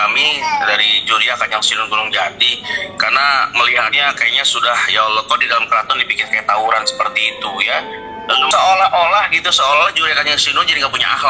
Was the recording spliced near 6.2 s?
no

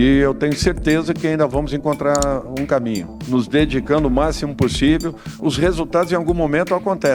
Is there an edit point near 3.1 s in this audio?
yes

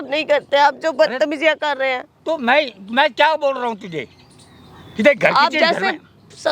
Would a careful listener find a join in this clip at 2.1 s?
no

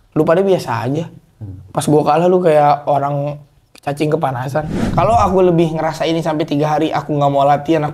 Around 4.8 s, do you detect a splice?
yes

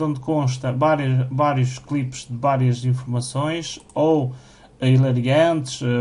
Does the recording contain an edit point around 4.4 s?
no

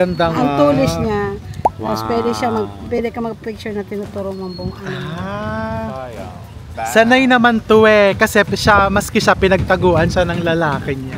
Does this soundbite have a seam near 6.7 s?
yes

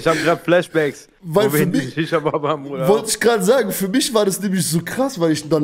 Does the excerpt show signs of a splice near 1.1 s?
no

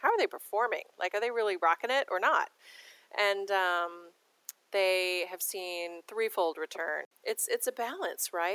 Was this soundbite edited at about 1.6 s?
no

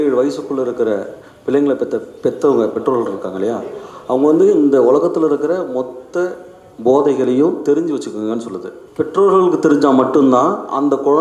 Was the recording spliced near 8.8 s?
yes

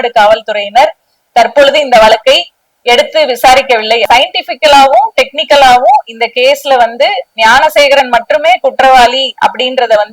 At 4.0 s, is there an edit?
yes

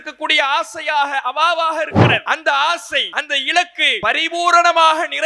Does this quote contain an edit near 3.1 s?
yes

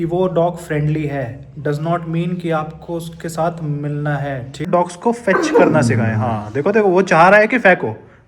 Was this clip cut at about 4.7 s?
yes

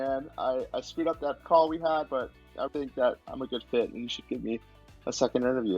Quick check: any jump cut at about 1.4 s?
yes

